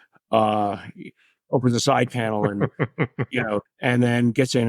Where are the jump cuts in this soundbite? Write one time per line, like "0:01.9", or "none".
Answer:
0:03.7